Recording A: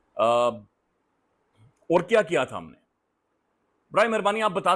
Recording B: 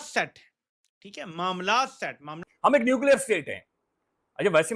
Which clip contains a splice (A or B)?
B